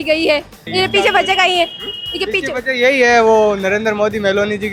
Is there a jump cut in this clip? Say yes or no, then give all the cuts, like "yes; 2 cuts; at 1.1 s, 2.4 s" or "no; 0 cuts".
no; 0 cuts